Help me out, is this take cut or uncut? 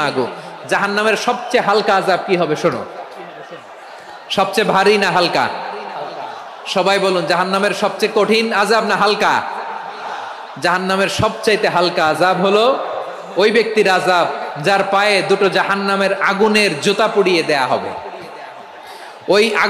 uncut